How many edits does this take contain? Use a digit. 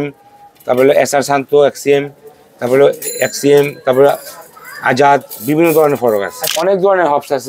1